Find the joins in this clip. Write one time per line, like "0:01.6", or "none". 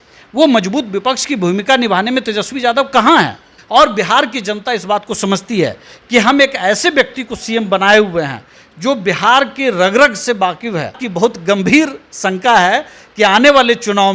0:03.5
0:11.0